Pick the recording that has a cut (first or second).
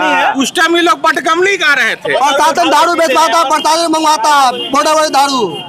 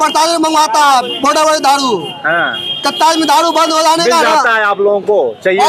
first